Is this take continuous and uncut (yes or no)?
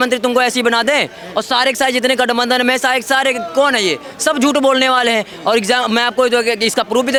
yes